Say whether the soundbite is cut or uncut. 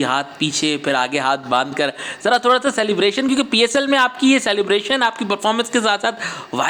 uncut